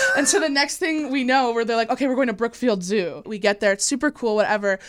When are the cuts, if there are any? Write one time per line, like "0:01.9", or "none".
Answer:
0:03.3